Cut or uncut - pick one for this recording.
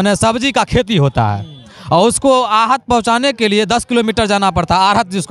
uncut